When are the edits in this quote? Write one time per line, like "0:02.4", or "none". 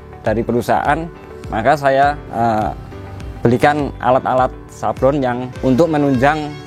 0:05.5